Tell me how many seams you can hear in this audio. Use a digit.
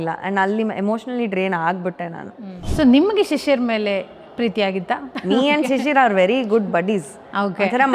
2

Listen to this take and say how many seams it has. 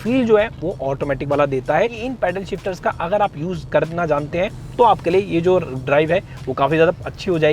1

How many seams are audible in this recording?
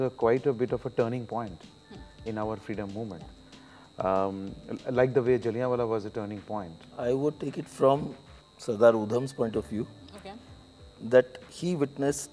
1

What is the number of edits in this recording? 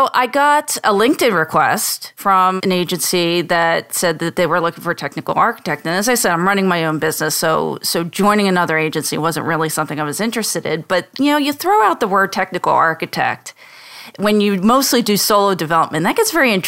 2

